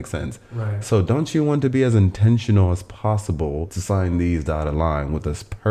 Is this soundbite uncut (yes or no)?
no